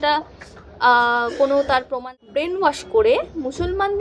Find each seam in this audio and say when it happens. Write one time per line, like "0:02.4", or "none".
0:01.9